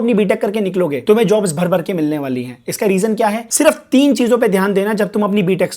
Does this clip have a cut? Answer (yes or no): yes